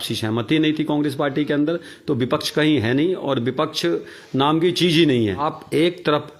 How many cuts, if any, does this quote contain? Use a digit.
1